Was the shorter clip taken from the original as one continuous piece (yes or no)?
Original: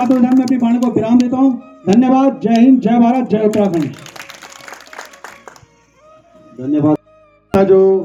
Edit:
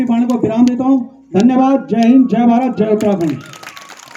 yes